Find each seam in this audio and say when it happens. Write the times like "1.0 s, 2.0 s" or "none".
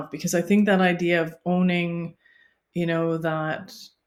none